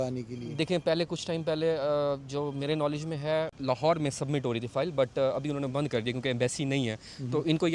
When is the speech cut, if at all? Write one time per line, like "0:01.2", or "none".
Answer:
0:03.6